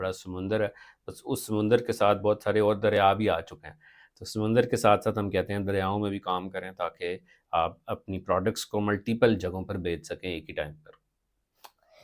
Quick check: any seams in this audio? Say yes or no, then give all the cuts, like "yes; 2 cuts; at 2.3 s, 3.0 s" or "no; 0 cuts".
no; 0 cuts